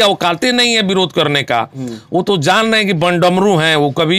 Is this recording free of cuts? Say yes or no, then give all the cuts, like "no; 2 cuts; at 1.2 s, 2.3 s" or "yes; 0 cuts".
yes; 0 cuts